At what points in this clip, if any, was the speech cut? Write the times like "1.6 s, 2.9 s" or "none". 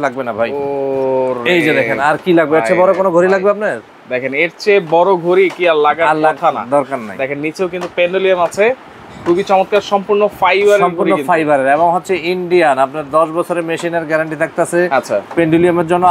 none